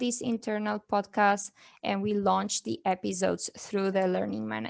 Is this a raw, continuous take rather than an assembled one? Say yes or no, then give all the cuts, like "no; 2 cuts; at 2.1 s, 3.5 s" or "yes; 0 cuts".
yes; 0 cuts